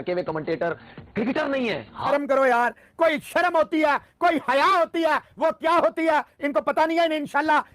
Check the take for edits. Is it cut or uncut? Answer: cut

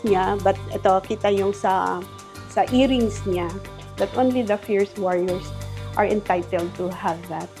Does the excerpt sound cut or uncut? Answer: uncut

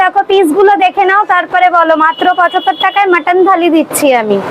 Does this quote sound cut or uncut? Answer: uncut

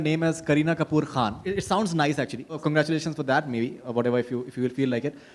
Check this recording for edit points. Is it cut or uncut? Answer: cut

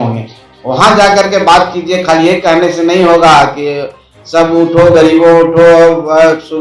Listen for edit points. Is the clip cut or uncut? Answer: uncut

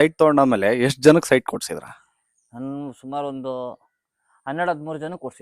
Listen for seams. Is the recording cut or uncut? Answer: uncut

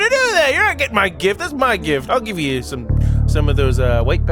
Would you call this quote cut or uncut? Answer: cut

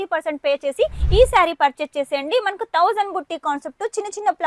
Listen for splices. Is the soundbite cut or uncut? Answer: cut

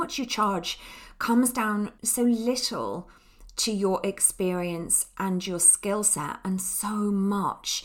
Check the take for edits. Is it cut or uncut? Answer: uncut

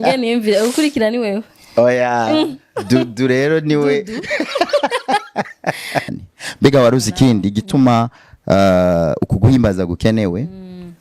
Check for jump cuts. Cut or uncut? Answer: cut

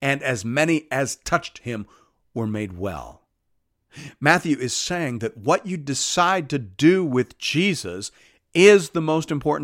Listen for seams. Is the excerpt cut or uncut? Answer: uncut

